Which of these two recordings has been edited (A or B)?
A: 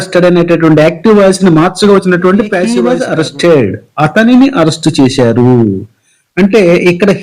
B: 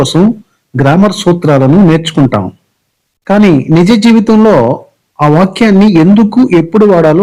A